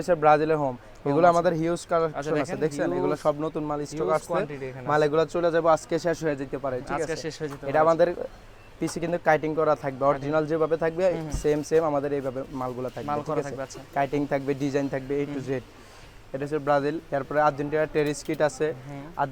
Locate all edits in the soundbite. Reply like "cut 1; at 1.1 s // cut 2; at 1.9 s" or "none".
none